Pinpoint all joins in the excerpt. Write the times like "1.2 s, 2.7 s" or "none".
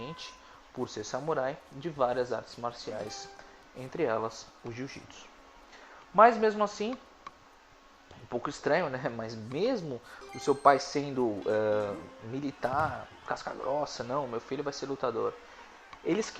6.9 s